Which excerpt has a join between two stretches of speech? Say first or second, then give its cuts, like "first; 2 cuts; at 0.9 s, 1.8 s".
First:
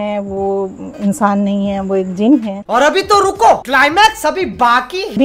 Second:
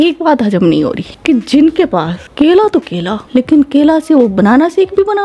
first; 2 cuts; at 2.7 s, 3.6 s